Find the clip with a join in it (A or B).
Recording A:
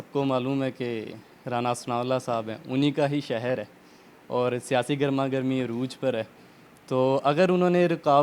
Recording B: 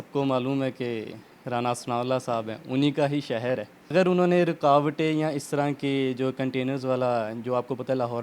B